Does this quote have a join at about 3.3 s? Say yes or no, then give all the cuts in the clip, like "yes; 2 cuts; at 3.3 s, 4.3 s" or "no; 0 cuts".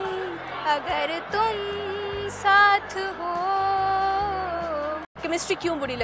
no; 1 cut; at 5.1 s